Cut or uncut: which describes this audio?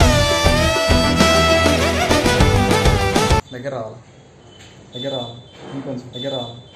cut